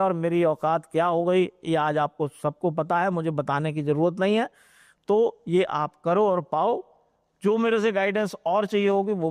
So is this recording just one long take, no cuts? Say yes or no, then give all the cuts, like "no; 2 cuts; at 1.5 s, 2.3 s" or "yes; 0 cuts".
yes; 0 cuts